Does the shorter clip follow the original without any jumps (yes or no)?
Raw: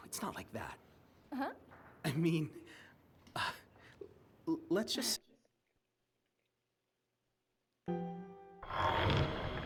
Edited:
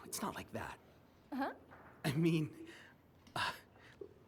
yes